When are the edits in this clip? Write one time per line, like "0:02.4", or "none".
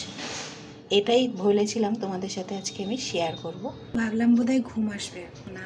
0:03.9